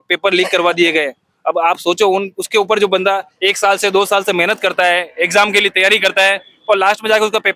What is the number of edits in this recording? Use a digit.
0